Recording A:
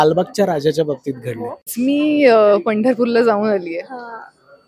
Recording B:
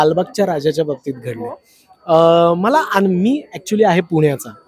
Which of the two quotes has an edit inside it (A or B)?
A